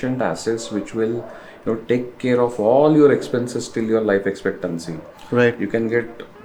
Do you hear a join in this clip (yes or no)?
no